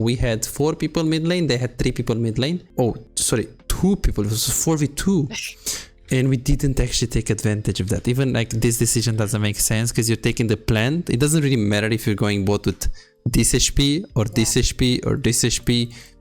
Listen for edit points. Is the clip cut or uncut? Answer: cut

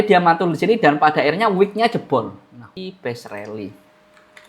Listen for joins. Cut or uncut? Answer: cut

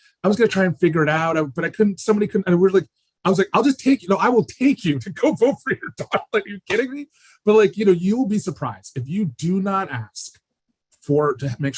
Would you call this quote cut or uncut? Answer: uncut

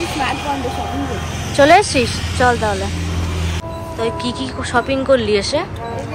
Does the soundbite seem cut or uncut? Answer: uncut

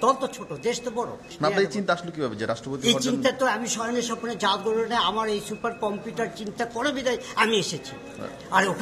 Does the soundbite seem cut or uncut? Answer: cut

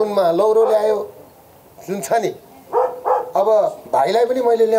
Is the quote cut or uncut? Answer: uncut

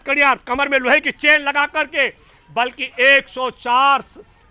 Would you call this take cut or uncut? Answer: uncut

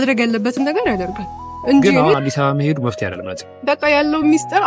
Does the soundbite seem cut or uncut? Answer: cut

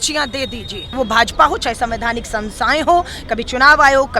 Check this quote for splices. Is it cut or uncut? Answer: cut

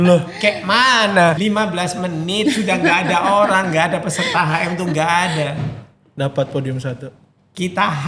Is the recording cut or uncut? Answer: cut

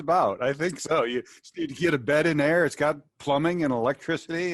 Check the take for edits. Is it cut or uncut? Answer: uncut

